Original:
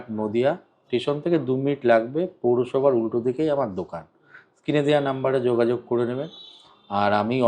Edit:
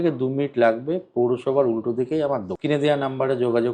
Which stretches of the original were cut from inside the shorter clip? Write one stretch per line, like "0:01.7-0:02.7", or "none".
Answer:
0:03.8-0:04.6